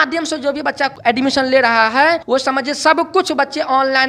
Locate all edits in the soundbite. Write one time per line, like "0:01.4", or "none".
0:01.0
0:02.2